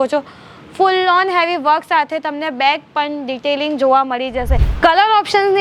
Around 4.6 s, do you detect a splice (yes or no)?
yes